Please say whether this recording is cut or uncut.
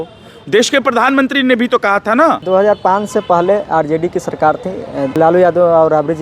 cut